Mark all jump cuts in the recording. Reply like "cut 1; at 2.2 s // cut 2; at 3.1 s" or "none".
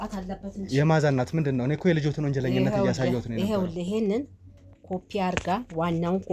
none

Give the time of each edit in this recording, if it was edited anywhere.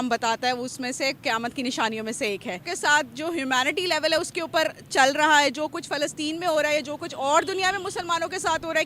cut 1; at 2.7 s

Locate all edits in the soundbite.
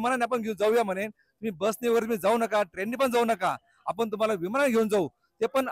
none

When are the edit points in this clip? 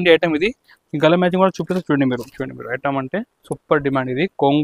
cut 1; at 2.3 s

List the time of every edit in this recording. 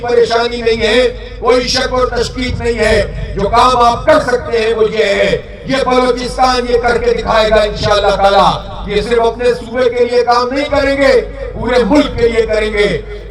none

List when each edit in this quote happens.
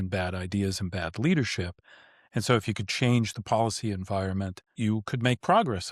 cut 1; at 4.7 s

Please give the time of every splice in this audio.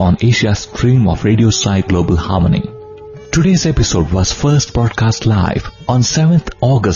cut 1; at 5.7 s

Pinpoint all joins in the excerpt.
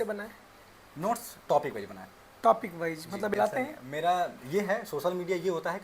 cut 1; at 3.3 s

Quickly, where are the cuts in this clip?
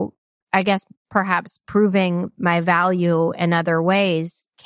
cut 1; at 1.7 s

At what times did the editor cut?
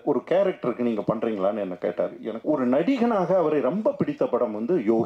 cut 1; at 2.3 s

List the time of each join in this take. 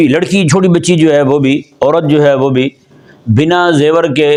none

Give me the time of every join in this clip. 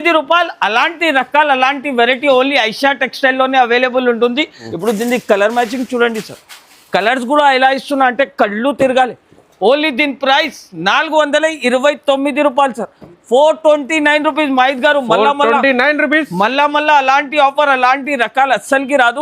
cut 1; at 4.6 s

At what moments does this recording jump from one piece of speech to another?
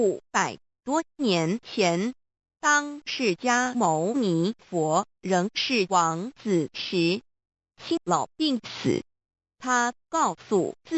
cut 1; at 8.0 s

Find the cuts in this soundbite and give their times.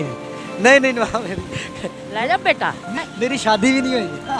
cut 1; at 3.0 s

